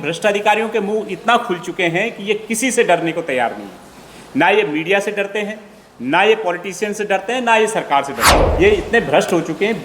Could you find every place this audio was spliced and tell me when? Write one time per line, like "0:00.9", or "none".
0:08.4